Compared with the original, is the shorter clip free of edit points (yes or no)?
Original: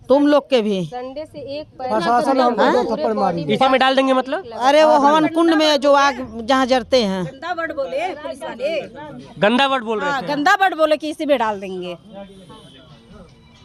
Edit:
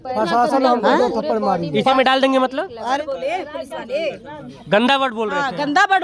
no